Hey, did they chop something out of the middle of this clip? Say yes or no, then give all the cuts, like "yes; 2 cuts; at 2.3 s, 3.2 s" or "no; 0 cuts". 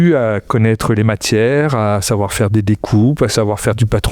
no; 0 cuts